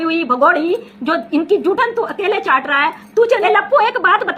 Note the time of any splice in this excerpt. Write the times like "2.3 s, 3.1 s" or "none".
3.4 s